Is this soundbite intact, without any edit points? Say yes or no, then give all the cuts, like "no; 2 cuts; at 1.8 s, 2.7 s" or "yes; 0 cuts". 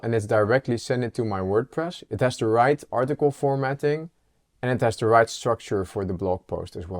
yes; 0 cuts